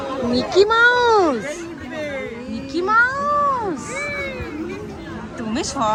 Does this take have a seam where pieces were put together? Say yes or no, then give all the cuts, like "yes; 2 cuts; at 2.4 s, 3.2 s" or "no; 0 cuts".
no; 0 cuts